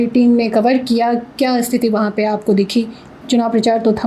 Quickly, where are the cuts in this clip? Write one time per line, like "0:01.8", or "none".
none